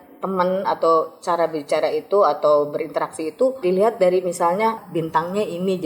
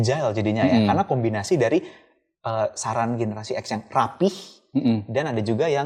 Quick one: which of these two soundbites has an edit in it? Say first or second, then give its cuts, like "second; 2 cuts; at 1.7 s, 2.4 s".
first; 2 cuts; at 3.6 s, 4.8 s